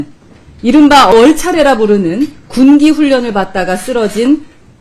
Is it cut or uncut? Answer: uncut